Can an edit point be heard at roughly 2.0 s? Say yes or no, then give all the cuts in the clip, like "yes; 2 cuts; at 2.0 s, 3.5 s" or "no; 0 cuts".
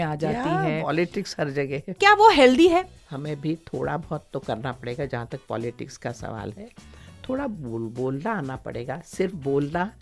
yes; 2 cuts; at 2.0 s, 3.0 s